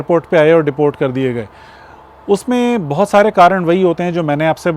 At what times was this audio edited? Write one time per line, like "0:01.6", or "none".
none